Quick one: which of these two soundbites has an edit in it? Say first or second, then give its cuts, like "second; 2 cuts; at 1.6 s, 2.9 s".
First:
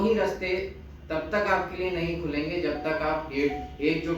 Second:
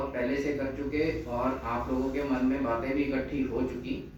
first; 1 cut; at 2.5 s